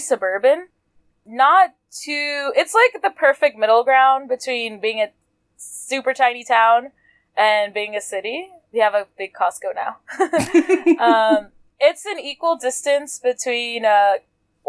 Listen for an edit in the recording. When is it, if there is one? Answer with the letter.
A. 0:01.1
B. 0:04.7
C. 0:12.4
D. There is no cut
A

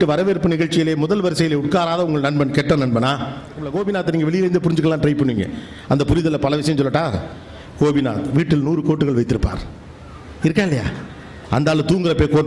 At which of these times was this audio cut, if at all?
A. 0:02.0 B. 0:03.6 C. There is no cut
B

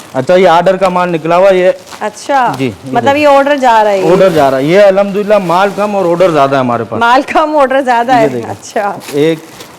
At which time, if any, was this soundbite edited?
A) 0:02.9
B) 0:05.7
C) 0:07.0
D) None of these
D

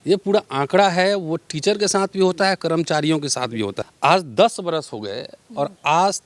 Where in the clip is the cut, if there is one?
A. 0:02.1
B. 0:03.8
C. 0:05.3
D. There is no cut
B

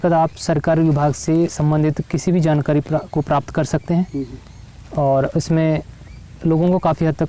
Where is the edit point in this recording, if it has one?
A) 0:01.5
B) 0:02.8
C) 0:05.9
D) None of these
D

